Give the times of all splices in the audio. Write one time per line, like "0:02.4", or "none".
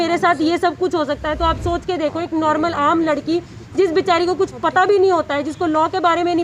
none